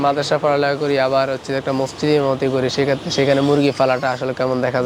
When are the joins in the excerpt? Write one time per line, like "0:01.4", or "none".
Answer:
none